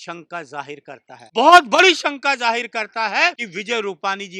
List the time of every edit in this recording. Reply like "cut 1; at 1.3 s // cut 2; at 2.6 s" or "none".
cut 1; at 1.1 s // cut 2; at 3.5 s